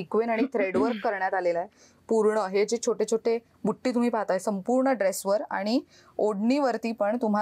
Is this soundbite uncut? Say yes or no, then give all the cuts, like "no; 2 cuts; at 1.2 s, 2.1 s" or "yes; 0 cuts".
yes; 0 cuts